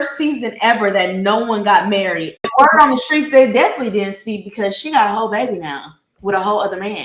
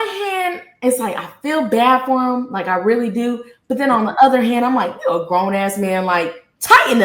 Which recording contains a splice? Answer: first; 1 cut; at 2.4 s

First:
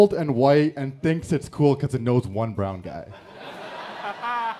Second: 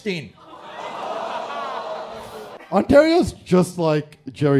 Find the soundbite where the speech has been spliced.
second; 1 cut; at 2.6 s

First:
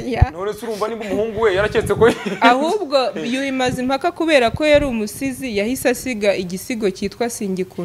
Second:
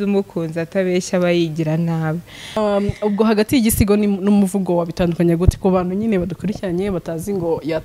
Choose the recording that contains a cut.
second; 1 cut; at 2.6 s

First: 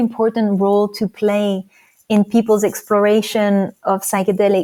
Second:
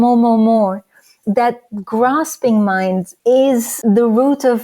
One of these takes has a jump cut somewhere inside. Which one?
second; 3 cuts; at 1.1 s, 3.1 s, 3.7 s

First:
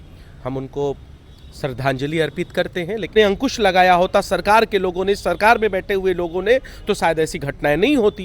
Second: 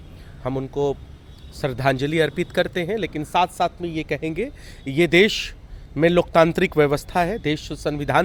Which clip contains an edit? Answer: first; 1 cut; at 3.1 s

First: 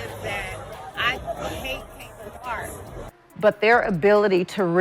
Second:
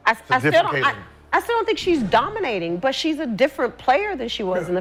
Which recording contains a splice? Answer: first; 1 cut; at 3.1 s

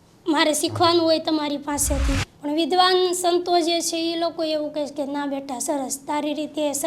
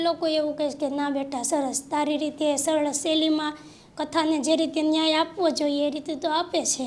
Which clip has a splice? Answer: first; 1 cut; at 2.3 s

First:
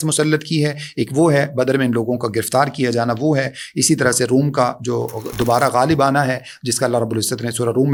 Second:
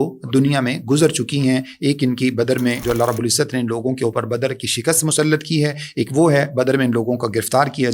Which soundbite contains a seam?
second; 1 cut; at 2.8 s

